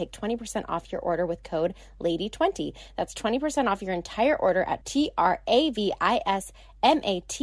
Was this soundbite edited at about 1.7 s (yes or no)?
no